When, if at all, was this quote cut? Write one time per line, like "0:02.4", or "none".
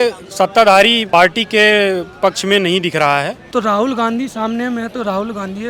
0:01.0
0:03.4